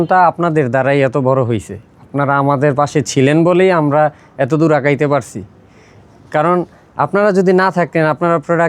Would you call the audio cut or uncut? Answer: uncut